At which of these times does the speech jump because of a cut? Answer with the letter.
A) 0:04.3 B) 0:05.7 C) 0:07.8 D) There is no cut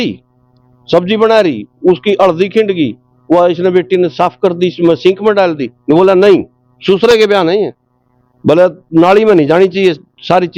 D